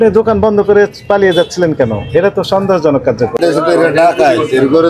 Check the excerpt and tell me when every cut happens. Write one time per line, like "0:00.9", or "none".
0:03.3